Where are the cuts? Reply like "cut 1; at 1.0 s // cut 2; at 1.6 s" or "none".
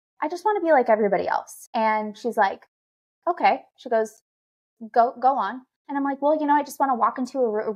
cut 1; at 1.6 s